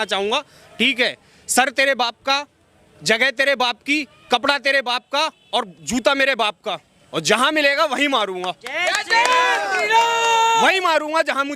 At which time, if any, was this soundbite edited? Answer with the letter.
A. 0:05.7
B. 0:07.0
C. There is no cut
C